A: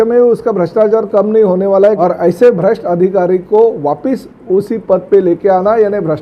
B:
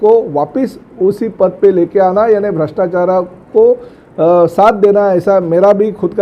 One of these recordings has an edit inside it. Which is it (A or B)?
A